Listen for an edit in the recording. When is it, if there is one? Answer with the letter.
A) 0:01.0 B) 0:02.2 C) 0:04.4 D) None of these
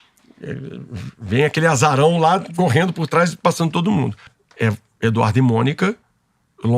C